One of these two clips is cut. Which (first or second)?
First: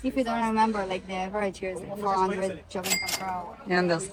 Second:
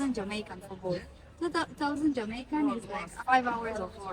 second